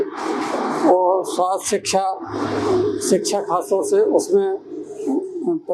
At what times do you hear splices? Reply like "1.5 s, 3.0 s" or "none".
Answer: none